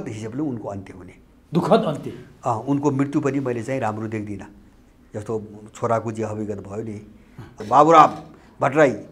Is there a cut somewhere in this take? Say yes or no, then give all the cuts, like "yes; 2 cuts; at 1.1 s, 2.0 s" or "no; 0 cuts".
yes; 1 cut; at 7.6 s